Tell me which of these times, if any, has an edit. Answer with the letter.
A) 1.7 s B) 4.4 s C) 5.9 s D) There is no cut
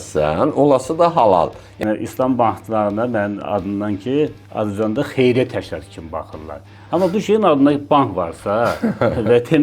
A